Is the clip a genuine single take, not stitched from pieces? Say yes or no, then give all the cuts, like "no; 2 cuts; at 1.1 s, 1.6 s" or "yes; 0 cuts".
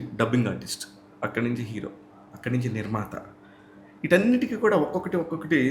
yes; 0 cuts